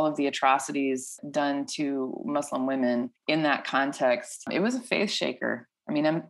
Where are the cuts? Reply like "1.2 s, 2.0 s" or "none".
1.1 s, 3.2 s, 4.5 s